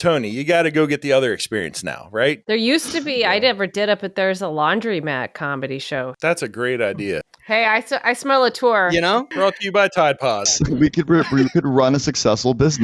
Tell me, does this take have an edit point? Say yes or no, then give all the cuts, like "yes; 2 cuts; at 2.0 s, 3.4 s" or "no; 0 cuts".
yes; 4 cuts; at 2.4 s, 6.1 s, 7.3 s, 9.3 s